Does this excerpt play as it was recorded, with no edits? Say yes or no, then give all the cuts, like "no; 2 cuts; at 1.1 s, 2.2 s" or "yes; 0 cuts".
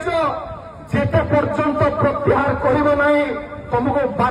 yes; 0 cuts